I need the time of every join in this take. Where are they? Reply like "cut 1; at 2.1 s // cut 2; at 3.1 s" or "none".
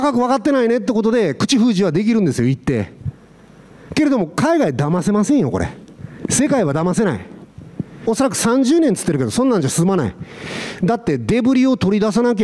cut 1; at 8.0 s